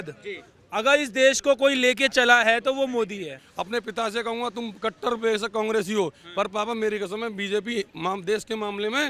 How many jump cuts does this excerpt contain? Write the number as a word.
one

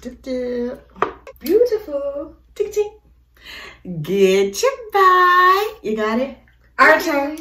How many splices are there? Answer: one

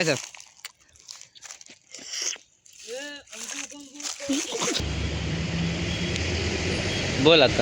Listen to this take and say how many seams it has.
one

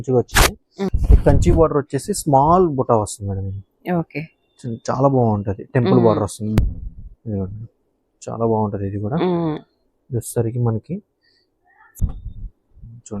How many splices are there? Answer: three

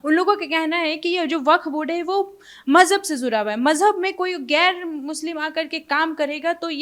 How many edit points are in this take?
zero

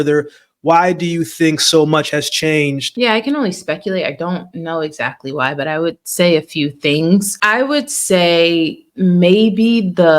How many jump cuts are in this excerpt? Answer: two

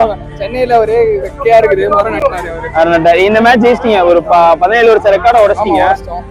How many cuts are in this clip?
zero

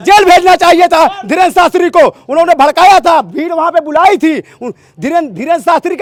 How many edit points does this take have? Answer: zero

